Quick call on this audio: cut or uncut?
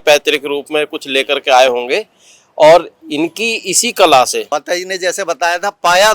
cut